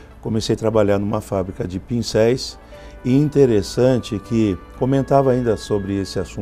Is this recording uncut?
yes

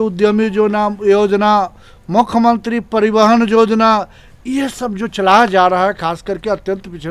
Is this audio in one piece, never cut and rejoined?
yes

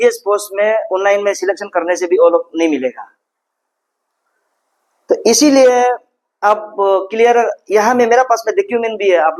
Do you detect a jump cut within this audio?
no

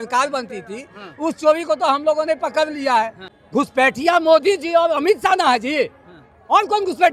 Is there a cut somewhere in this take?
yes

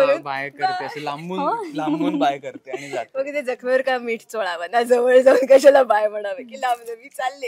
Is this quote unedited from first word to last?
yes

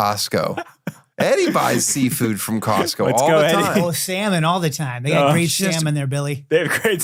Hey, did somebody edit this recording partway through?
no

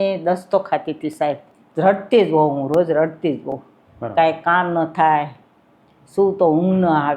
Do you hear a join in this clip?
yes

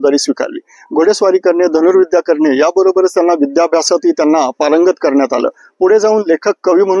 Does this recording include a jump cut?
no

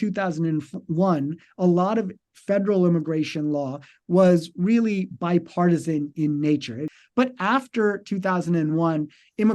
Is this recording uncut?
no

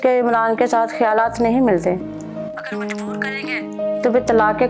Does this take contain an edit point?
no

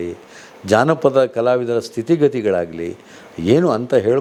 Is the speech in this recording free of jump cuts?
yes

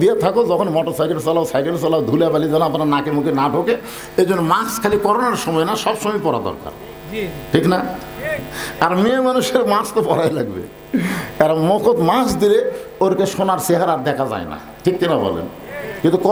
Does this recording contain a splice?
no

